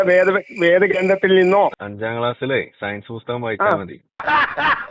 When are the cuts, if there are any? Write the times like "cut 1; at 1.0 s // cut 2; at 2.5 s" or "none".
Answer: cut 1; at 1.8 s

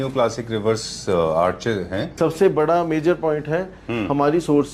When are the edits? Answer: cut 1; at 2.2 s

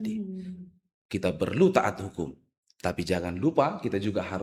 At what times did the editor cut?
none

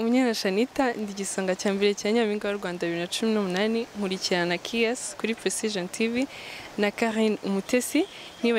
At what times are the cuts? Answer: none

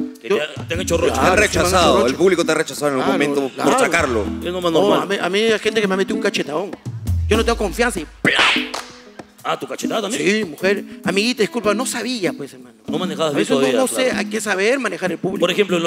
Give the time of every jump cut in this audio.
none

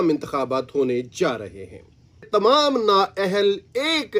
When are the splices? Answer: cut 1; at 2.3 s

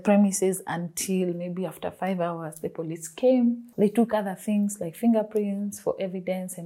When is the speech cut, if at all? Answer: none

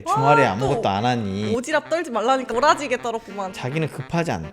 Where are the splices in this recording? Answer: cut 1; at 2.5 s // cut 2; at 3.6 s

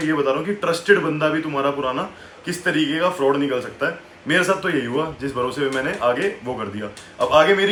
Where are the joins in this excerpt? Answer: none

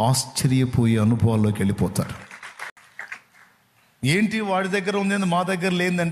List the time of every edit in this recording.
cut 1; at 2.8 s

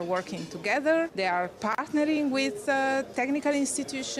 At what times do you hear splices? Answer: cut 1; at 1.1 s

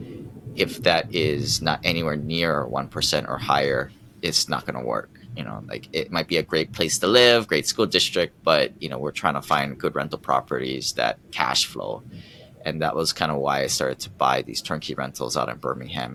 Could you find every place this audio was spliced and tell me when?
none

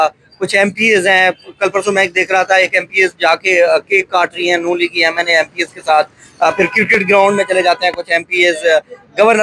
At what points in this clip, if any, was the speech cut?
none

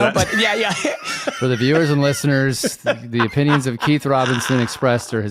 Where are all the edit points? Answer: cut 1; at 1.4 s

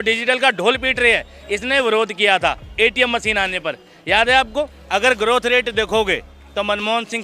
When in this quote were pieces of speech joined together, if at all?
cut 1; at 4.8 s

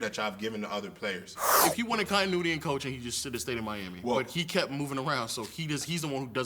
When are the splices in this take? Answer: cut 1; at 1.6 s

